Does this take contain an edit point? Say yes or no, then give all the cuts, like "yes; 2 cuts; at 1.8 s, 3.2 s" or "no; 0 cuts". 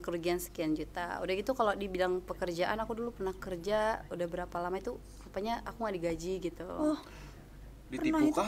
no; 0 cuts